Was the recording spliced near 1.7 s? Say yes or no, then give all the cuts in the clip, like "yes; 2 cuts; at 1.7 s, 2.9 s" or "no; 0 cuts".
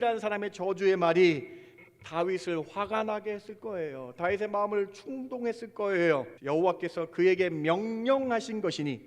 no; 1 cut; at 6.3 s